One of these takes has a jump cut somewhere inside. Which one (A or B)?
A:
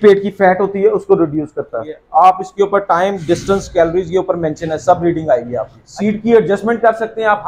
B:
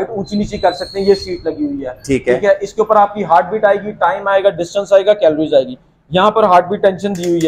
A